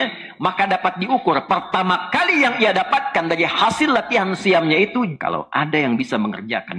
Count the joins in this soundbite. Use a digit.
1